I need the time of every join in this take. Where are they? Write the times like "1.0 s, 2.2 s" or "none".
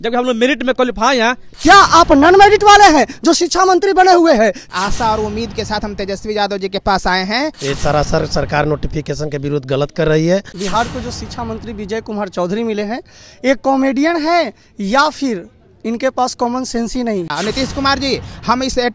1.5 s, 4.6 s, 7.6 s, 10.5 s, 17.3 s

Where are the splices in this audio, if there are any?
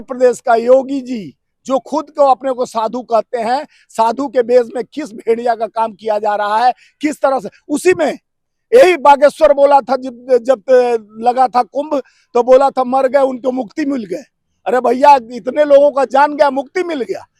none

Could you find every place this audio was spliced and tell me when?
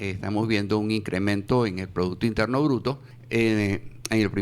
3.1 s

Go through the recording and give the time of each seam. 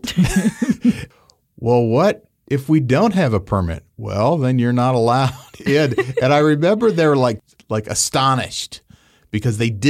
1.1 s, 7.5 s

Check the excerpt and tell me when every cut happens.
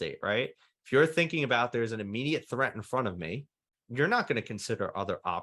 3.8 s

